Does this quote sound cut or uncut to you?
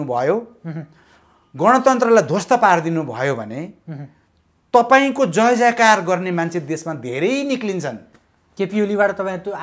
uncut